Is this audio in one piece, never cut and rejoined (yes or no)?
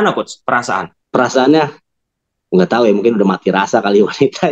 no